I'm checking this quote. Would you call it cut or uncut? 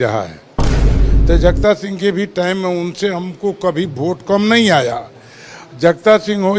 cut